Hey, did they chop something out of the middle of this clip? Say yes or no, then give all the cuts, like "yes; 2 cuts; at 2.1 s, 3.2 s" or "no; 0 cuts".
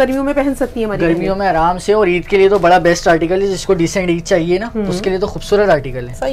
no; 0 cuts